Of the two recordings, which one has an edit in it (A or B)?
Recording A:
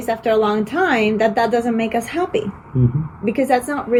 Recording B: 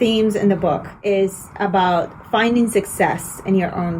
B